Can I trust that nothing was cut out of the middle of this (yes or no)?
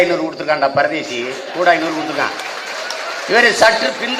yes